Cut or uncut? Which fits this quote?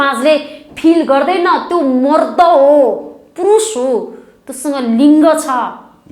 uncut